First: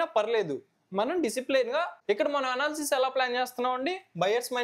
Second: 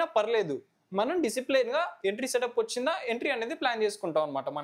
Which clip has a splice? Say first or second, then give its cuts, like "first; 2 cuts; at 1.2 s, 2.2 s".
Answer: first; 1 cut; at 1.9 s